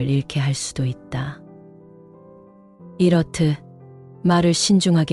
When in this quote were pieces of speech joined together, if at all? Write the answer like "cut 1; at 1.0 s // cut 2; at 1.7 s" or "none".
cut 1; at 1.3 s // cut 2; at 3.0 s